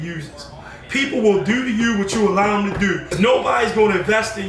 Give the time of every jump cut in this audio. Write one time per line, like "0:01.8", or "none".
0:03.1